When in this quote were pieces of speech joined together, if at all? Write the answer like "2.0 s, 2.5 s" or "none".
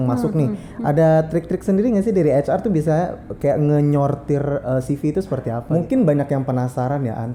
5.6 s